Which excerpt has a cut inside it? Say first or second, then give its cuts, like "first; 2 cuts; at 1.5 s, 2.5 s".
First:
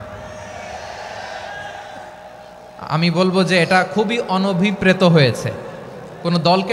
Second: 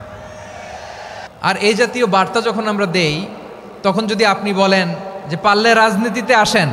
second; 1 cut; at 1.2 s